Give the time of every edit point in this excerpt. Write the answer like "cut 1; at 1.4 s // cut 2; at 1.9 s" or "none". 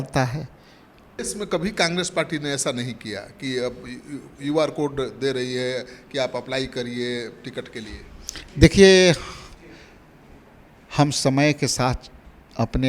cut 1; at 1.2 s

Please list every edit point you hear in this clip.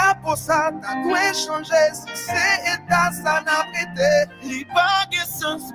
none

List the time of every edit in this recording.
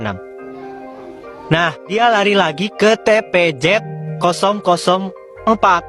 cut 1; at 1.9 s

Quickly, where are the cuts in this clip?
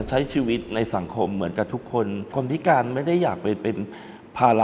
cut 1; at 2.3 s

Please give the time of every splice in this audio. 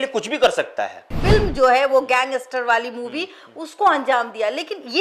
cut 1; at 1.2 s

